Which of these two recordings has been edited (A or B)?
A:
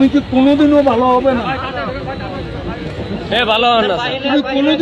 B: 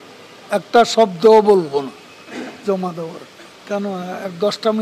B